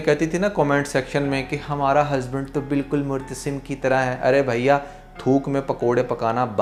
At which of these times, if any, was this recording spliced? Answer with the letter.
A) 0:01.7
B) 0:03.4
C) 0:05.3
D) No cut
D